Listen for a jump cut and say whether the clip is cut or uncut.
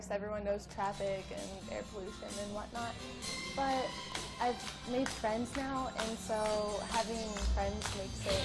cut